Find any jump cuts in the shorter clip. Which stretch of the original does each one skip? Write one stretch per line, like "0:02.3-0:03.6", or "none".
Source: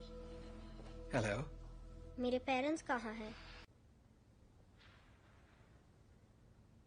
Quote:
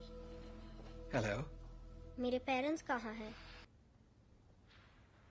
0:03.7-0:03.8